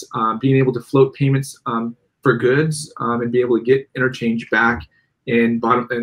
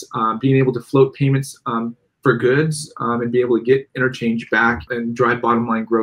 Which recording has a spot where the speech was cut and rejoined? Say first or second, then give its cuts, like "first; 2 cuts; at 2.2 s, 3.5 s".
second; 1 cut; at 4.9 s